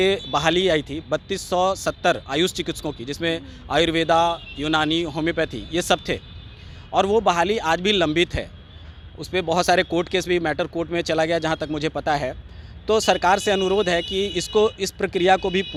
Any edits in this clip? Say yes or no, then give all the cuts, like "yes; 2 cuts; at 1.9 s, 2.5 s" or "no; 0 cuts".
no; 0 cuts